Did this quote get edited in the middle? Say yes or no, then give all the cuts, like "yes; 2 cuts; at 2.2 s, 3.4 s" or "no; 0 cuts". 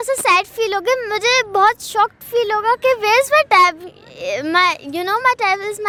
no; 0 cuts